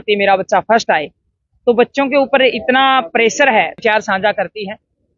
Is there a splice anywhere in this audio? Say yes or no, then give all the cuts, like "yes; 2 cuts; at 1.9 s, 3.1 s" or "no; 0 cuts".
yes; 1 cut; at 3.8 s